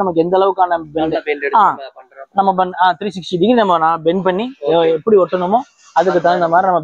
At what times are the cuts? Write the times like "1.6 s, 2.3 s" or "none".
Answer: none